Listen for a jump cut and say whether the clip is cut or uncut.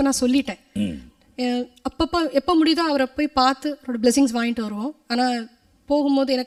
uncut